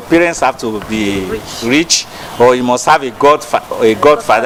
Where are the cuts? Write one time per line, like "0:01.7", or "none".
none